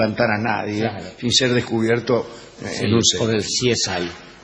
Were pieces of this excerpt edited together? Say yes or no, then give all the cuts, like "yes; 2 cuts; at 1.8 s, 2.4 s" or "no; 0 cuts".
yes; 1 cut; at 3.3 s